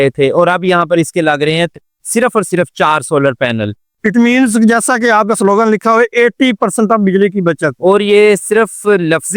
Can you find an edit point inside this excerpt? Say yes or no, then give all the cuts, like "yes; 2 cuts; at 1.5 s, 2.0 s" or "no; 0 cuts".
yes; 1 cut; at 3.9 s